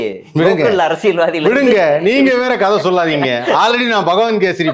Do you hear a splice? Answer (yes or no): no